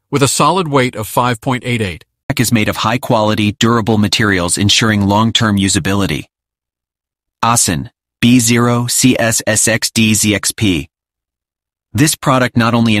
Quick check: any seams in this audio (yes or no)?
yes